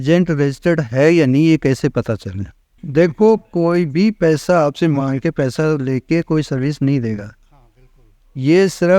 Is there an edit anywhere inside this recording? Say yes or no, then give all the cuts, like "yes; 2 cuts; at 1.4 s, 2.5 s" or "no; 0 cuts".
yes; 1 cut; at 2.7 s